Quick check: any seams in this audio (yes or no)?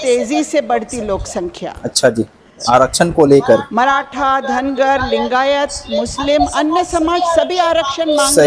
yes